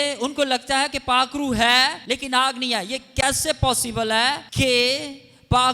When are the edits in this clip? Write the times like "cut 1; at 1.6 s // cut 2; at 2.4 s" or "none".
cut 1; at 2.0 s // cut 2; at 4.5 s